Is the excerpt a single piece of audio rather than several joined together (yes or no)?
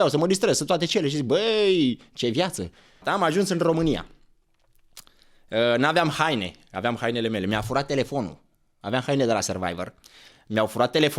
no